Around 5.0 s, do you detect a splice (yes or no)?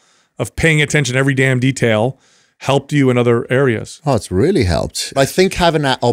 yes